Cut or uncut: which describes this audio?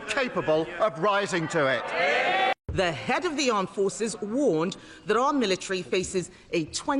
cut